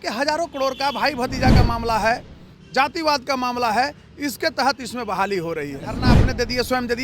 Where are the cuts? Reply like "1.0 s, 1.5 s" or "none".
6.0 s